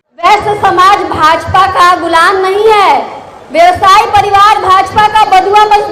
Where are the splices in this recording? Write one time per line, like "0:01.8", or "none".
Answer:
none